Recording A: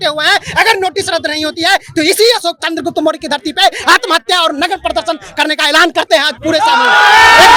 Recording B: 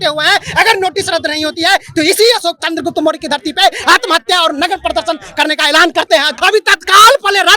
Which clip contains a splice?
B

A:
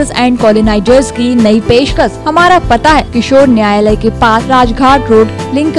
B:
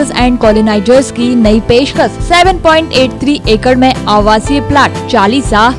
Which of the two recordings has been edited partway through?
A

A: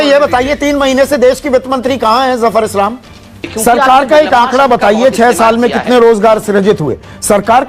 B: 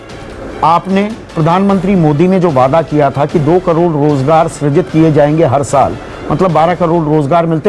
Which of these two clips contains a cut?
A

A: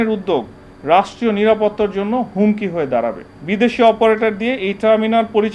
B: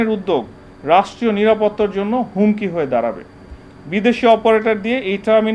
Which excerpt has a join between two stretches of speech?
A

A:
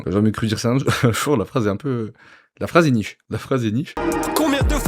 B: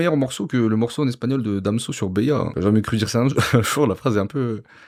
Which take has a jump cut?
A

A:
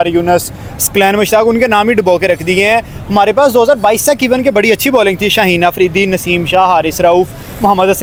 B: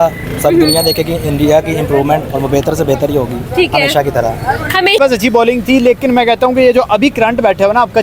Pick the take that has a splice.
B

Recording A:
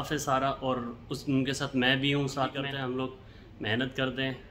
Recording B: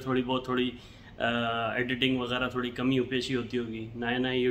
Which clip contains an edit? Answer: A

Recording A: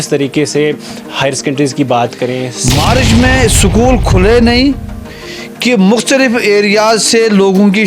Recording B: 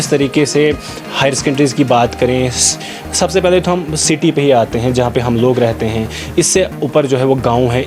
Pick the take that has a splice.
A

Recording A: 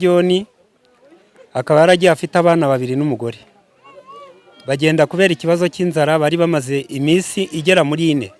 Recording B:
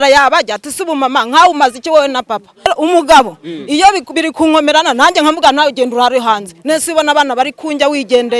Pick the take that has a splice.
B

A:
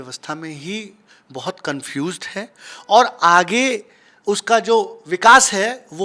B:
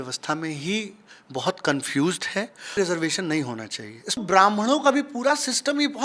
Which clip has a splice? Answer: B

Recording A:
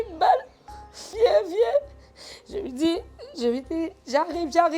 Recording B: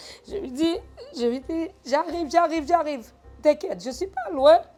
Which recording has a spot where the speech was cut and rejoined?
A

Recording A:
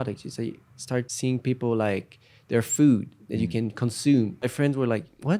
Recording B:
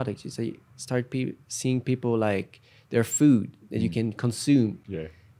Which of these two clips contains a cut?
A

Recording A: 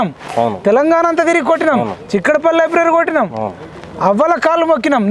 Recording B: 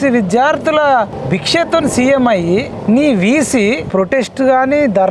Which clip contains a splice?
B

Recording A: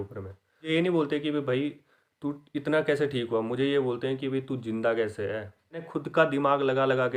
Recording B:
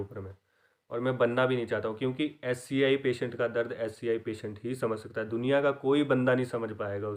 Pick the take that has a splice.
A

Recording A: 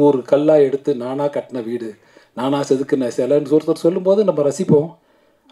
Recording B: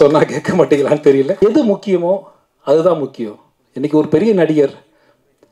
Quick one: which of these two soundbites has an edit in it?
B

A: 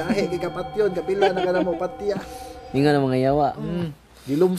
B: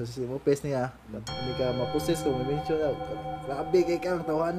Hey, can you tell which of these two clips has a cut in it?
B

